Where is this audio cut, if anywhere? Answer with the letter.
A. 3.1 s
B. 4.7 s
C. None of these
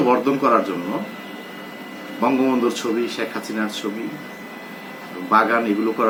C